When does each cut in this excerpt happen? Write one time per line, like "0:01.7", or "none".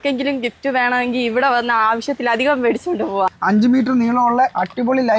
0:03.3